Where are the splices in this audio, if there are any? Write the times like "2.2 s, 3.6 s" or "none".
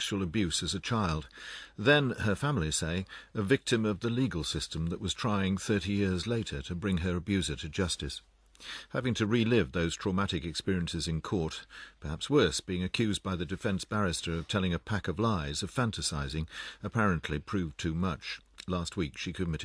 8.3 s